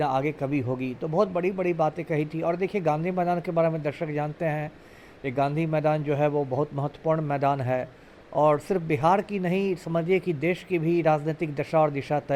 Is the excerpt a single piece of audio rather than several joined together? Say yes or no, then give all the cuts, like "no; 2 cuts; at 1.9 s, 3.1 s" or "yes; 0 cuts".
yes; 0 cuts